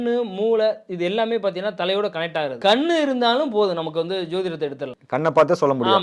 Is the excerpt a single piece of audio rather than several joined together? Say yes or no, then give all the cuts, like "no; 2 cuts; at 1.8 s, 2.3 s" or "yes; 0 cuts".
no; 2 cuts; at 2.5 s, 4.9 s